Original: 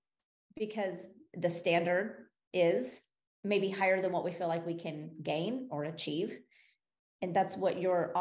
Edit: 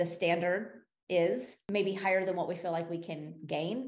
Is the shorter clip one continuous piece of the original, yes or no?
no